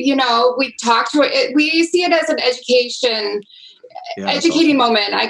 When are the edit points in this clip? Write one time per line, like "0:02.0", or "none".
none